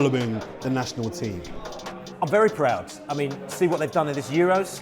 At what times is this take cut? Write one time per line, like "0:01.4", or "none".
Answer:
none

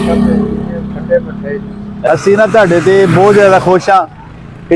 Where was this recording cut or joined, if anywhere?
0:02.1

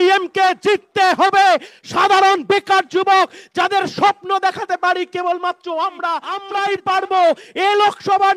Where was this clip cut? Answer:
0:06.4

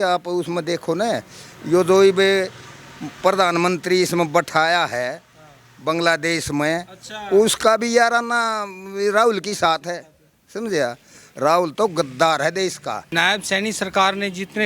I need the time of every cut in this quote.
0:13.0

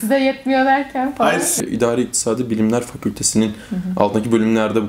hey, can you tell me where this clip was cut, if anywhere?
0:01.6

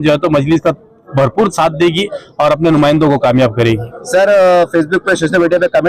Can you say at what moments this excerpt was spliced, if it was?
none

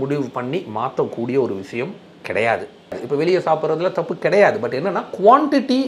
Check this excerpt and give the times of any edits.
0:03.0

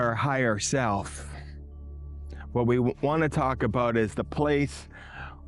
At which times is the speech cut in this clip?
none

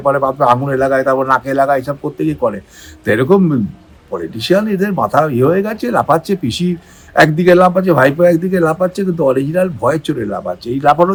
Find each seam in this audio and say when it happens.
none

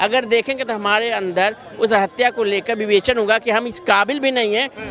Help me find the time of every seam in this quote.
none

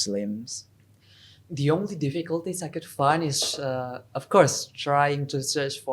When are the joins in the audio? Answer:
none

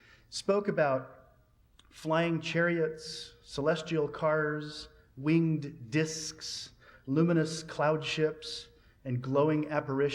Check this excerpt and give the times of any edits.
none

